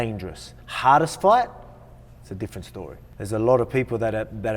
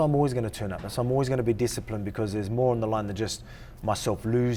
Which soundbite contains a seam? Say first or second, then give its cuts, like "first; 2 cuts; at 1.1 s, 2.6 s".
first; 1 cut; at 3.0 s